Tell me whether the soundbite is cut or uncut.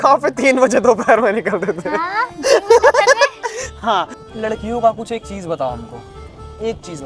cut